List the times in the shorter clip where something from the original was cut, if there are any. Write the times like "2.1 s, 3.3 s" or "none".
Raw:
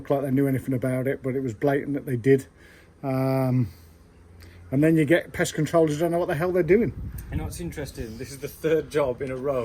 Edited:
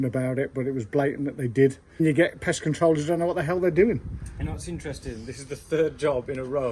2.0 s